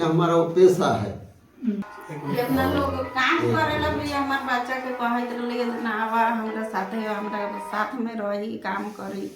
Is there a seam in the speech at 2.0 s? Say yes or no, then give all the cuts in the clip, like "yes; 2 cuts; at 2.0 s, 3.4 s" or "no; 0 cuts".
yes; 1 cut; at 2.0 s